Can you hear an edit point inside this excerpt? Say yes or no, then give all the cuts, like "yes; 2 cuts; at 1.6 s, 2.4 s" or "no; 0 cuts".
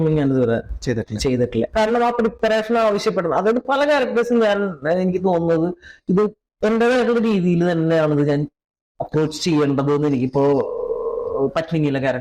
no; 0 cuts